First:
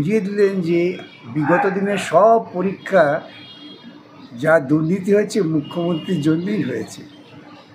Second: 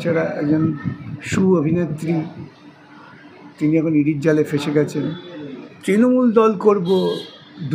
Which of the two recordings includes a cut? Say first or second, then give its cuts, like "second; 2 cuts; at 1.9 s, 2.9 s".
second; 1 cut; at 5.8 s